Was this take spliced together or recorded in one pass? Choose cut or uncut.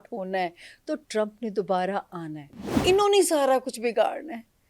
cut